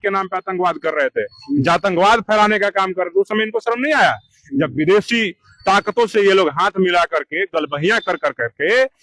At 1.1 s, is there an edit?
no; 0 cuts

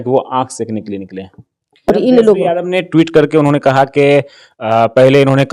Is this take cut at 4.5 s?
no; 1 cut; at 1.9 s

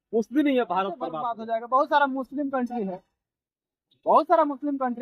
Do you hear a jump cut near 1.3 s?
yes; 1 cut; at 1.3 s

